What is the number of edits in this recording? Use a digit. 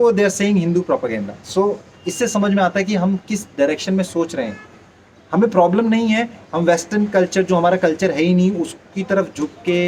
0